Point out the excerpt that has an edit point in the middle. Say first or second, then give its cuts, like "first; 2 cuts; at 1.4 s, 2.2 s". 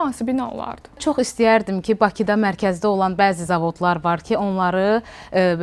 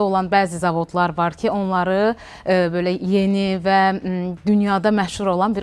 first; 1 cut; at 1.0 s